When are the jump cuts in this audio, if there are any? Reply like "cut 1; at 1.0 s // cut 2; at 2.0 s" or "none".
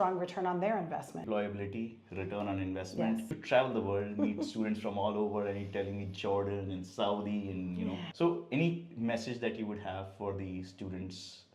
cut 1; at 1.2 s // cut 2; at 3.4 s // cut 3; at 8.1 s

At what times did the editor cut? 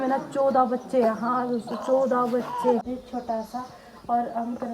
cut 1; at 2.8 s

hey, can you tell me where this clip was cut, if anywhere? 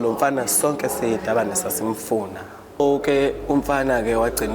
cut 1; at 2.8 s

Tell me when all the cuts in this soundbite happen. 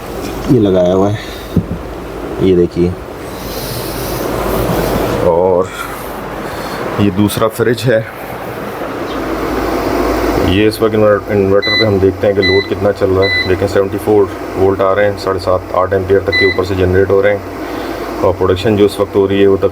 cut 1; at 9.2 s

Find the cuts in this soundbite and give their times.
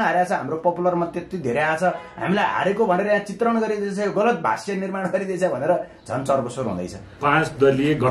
cut 1; at 7.0 s

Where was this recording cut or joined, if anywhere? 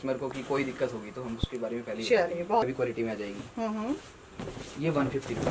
none

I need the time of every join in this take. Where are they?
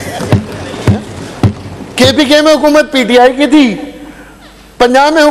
none

